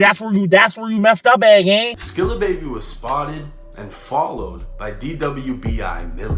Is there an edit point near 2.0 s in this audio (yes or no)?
yes